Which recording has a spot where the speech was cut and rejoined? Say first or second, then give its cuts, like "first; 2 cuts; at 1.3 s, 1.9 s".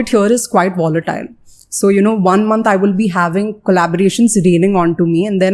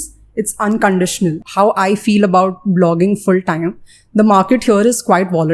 second; 1 cut; at 1.4 s